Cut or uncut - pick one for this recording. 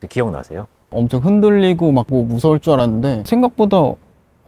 cut